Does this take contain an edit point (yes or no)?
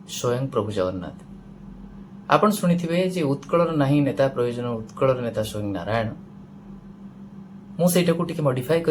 no